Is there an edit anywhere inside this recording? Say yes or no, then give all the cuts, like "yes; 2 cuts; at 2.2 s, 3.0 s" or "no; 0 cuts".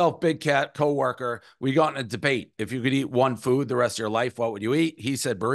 no; 0 cuts